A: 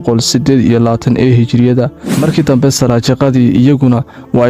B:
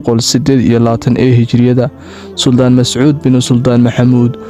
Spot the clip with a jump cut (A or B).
A